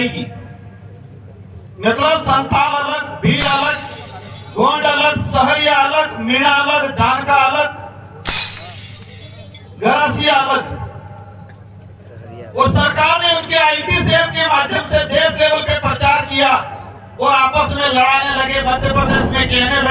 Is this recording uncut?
yes; 0 cuts

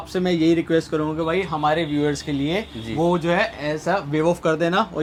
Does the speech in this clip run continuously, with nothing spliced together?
yes; 0 cuts

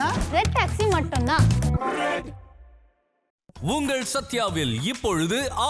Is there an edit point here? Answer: no; 0 cuts

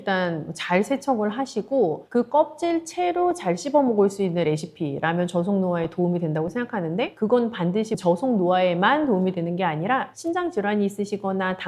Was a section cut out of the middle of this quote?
no; 0 cuts

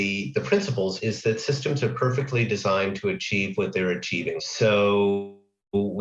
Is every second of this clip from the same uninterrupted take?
no; 1 cut; at 1.0 s

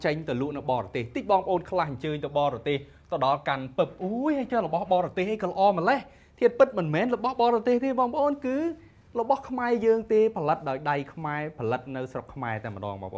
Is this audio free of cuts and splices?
yes; 0 cuts

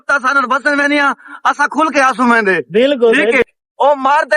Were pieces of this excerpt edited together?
yes; 1 cut; at 3.4 s

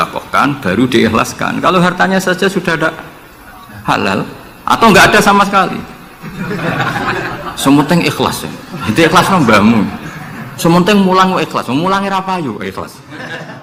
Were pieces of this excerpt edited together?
no; 0 cuts

